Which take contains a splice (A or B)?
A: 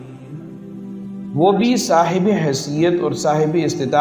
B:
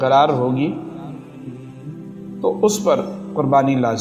B